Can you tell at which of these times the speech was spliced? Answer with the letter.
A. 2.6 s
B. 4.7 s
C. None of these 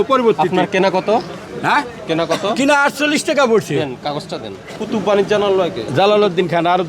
B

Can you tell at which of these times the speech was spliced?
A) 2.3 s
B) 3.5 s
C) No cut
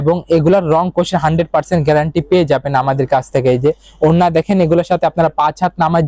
C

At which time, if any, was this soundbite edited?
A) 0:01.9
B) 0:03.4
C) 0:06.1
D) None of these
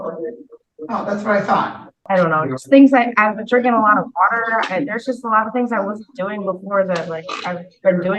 A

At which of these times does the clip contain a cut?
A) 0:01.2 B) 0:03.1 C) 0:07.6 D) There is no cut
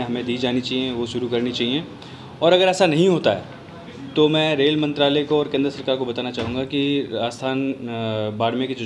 D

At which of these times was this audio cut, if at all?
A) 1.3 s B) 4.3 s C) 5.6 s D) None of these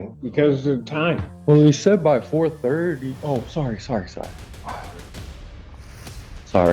A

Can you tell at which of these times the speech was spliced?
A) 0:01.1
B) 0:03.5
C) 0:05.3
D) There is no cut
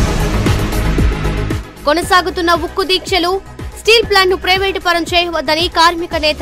A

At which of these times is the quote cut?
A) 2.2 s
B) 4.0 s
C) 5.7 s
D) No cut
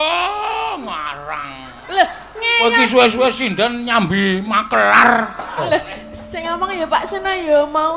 C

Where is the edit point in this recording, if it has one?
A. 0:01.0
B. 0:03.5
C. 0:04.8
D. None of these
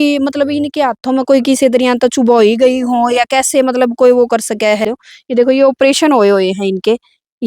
C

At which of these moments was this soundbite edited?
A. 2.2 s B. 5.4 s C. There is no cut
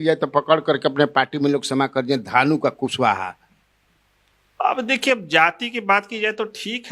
C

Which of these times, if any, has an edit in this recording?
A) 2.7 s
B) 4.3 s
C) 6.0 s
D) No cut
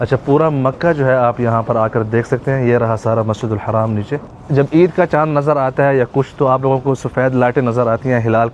B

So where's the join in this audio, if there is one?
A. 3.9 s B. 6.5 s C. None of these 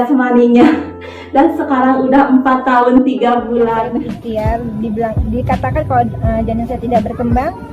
A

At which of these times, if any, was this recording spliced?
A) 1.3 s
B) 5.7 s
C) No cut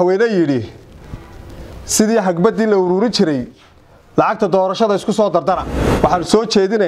B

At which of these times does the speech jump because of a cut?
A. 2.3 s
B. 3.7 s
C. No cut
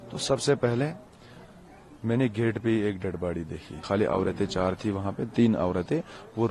B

